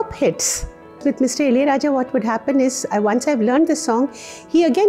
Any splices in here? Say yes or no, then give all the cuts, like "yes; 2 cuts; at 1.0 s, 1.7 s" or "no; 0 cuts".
yes; 1 cut; at 1.0 s